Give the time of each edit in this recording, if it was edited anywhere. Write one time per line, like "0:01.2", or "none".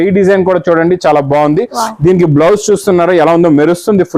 none